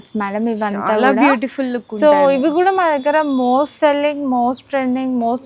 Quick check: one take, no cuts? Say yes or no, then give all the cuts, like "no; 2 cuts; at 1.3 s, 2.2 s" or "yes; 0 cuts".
yes; 0 cuts